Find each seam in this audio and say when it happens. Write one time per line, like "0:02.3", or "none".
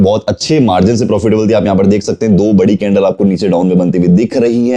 none